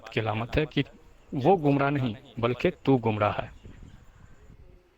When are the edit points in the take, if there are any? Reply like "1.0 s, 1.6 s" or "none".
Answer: 3.5 s